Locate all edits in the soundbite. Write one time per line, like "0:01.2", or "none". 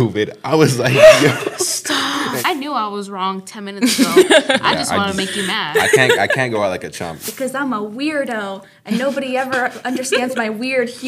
0:02.4
0:07.2

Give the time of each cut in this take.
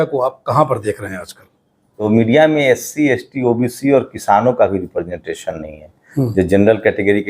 0:02.0

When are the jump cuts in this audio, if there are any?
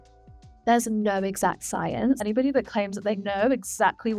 0:02.2

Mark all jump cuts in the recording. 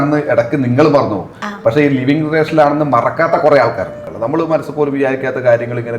0:04.0

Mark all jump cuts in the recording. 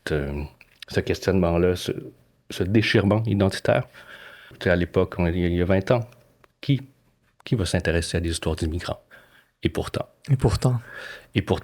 0:04.5

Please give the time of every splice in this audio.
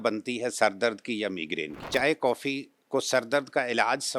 0:01.9

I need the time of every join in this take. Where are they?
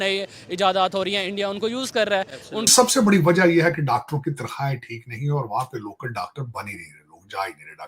0:02.7

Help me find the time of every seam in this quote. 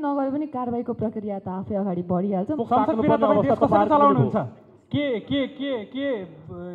0:02.6

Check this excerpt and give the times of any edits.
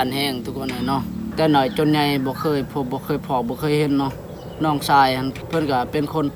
0:01.3
0:05.4

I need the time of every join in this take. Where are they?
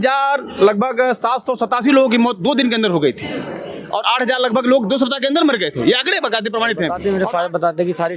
0:06.9

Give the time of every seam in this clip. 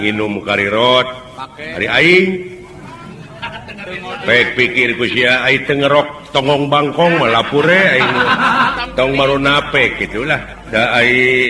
0:08.7
0:10.5

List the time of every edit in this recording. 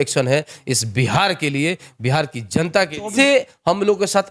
0:03.1

